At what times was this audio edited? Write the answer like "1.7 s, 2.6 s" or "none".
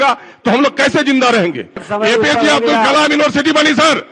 1.9 s